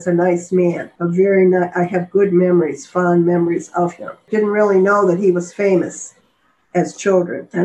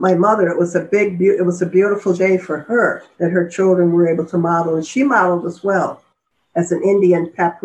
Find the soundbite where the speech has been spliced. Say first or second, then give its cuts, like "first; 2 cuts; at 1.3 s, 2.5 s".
first; 1 cut; at 4.3 s